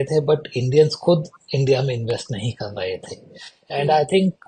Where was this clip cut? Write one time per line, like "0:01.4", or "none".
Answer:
none